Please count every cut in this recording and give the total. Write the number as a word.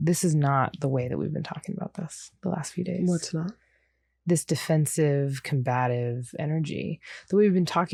zero